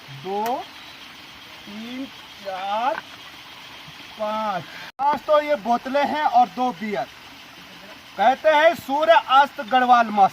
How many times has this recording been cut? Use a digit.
1